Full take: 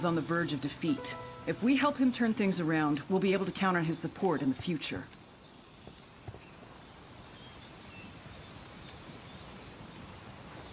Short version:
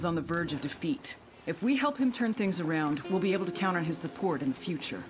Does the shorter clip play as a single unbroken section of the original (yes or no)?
yes